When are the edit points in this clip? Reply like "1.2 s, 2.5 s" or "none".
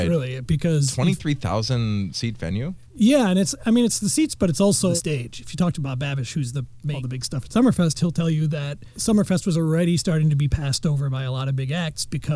4.9 s, 6.9 s